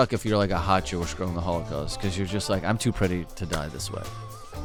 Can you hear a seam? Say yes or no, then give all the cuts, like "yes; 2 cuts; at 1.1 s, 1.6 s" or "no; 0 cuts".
no; 0 cuts